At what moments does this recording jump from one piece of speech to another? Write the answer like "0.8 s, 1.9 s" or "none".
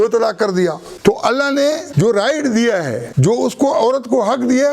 0.9 s, 1.9 s, 3.0 s